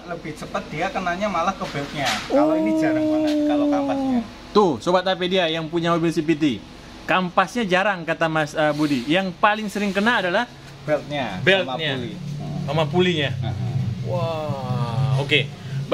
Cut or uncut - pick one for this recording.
uncut